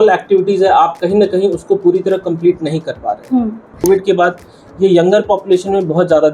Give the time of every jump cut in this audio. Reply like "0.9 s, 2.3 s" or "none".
3.8 s